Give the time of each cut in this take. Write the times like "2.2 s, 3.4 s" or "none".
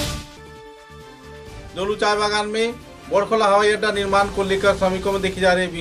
none